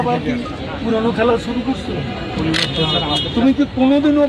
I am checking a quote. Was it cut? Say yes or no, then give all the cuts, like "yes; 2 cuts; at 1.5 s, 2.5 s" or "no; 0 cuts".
no; 0 cuts